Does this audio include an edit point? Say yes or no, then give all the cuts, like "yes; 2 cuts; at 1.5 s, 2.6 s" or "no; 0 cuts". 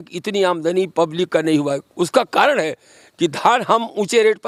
no; 0 cuts